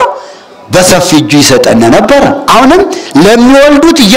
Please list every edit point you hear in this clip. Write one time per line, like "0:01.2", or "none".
0:02.4